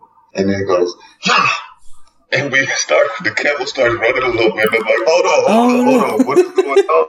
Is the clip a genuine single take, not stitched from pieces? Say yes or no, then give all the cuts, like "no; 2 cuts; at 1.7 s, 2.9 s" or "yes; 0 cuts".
yes; 0 cuts